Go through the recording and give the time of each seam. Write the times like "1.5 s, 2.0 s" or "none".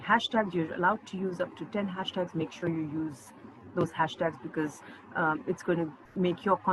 none